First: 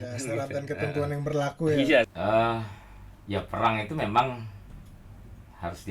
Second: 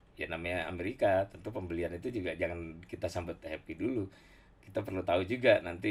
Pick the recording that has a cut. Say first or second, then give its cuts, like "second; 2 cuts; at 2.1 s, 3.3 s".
first; 1 cut; at 2.1 s